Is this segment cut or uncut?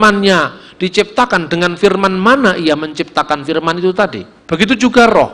cut